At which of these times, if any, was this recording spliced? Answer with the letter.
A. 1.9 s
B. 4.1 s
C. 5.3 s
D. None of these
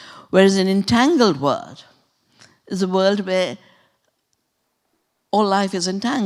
D